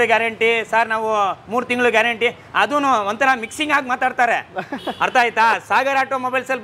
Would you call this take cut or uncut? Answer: uncut